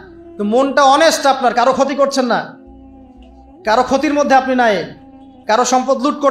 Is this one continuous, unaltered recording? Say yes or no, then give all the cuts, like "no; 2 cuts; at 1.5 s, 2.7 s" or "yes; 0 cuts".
yes; 0 cuts